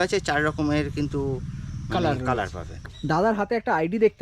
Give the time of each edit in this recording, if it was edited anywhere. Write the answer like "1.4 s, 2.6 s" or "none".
2.7 s